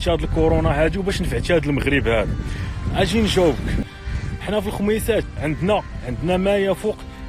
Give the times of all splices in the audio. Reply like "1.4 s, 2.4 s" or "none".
3.8 s, 5.2 s